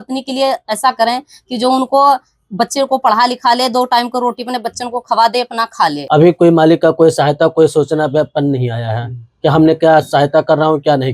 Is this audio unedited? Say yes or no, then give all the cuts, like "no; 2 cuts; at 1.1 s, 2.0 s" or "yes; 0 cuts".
no; 1 cut; at 6.0 s